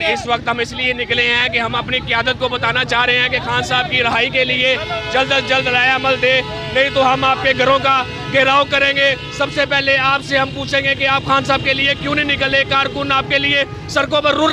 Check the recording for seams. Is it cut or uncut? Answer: uncut